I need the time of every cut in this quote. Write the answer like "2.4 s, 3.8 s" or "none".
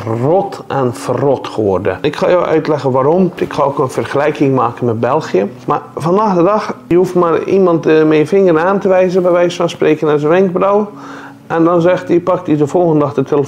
2.0 s, 3.4 s, 5.6 s, 6.8 s